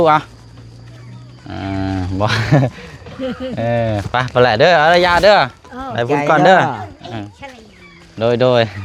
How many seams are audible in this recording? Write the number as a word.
zero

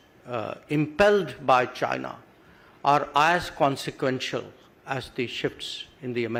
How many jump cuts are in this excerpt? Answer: zero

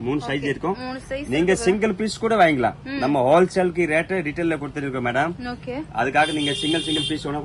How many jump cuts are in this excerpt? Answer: zero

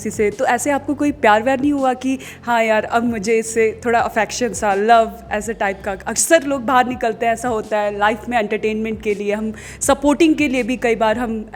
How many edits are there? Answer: zero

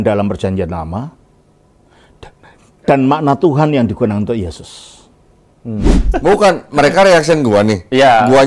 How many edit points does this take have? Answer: one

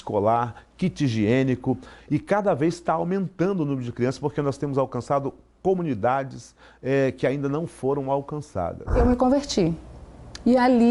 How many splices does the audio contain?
one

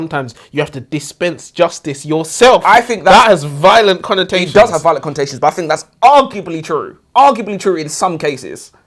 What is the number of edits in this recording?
zero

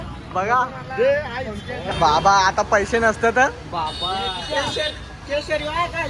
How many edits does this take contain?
one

